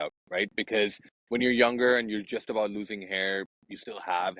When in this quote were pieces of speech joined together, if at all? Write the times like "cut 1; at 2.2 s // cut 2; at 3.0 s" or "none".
cut 1; at 1.1 s